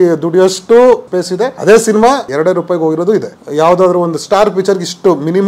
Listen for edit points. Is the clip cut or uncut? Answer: cut